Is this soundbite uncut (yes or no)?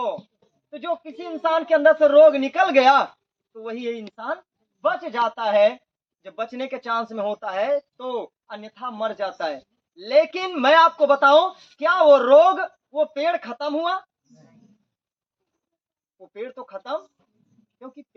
yes